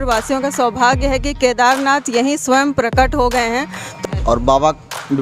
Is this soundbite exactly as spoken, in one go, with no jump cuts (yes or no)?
no